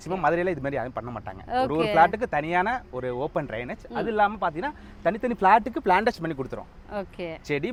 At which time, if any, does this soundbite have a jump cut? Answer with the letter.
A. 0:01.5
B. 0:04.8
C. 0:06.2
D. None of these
D